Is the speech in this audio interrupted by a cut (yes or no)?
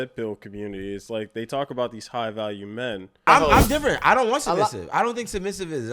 yes